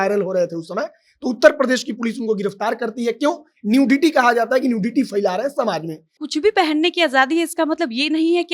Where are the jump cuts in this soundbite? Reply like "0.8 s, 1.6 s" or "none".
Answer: 6.2 s

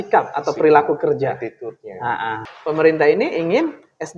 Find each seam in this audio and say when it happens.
2.4 s

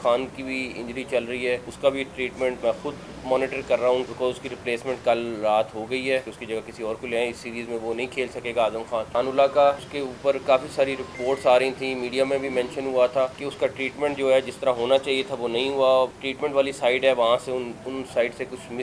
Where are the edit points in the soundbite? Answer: 1.7 s, 2.6 s, 4.1 s, 6.4 s, 9.1 s, 9.9 s, 11.2 s, 13.4 s, 16.2 s

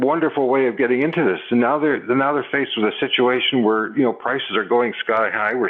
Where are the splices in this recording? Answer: none

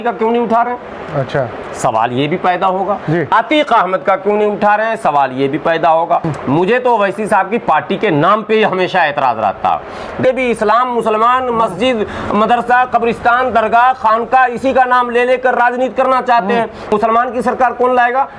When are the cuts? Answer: 6.3 s, 10.2 s, 16.9 s

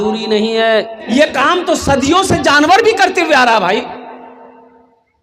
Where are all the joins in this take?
1.0 s

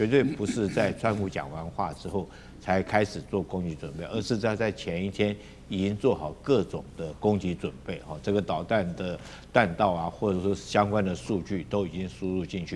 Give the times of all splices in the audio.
none

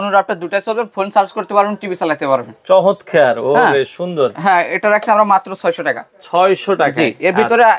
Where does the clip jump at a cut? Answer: none

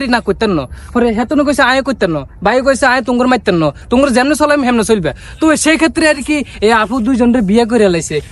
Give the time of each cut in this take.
3.8 s

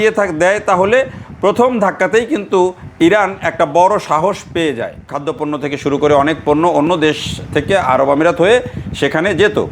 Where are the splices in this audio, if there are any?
5.2 s

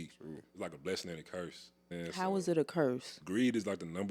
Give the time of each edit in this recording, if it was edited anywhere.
1.9 s, 3.1 s

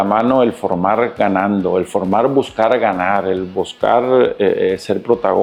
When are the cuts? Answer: none

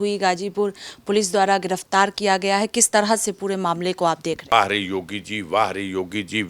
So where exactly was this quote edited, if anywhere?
4.5 s

